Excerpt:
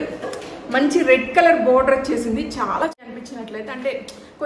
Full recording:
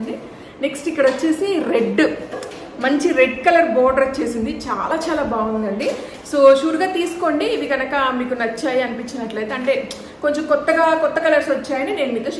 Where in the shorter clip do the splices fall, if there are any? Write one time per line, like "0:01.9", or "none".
0:03.0